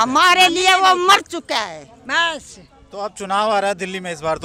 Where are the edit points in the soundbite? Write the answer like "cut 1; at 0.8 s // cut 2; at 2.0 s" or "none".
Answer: none